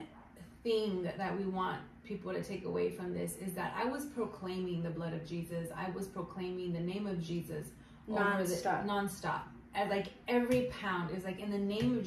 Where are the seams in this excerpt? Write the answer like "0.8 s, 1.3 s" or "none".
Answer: none